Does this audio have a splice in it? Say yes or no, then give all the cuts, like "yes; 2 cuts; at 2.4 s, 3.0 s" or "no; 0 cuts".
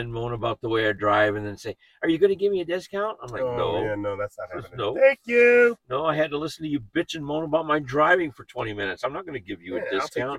no; 0 cuts